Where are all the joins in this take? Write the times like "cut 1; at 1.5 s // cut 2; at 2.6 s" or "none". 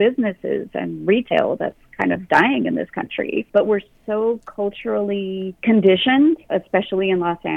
cut 1; at 3.4 s // cut 2; at 5.5 s // cut 3; at 6.4 s